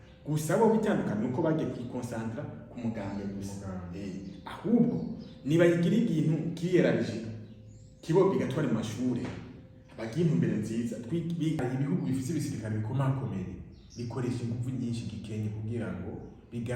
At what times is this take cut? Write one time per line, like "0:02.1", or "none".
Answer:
0:11.6

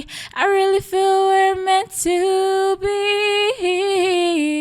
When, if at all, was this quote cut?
none

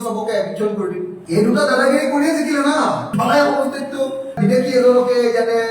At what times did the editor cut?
0:03.1

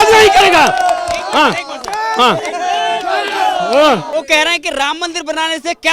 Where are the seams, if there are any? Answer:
0:04.1

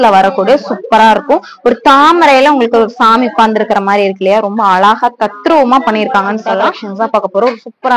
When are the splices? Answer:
0:06.8

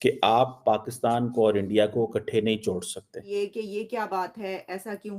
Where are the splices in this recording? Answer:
0:03.3

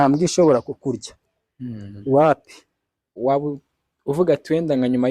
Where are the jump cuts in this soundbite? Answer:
0:03.1

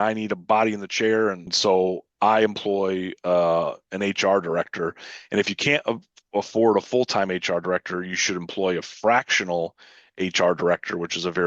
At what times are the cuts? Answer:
0:01.5

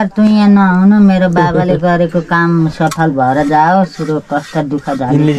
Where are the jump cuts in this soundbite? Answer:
none

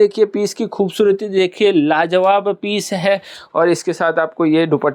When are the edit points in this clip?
none

